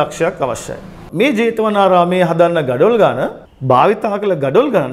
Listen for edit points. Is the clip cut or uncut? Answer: uncut